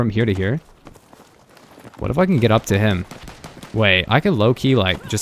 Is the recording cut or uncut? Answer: uncut